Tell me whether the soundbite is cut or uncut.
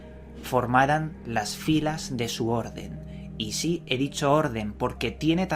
cut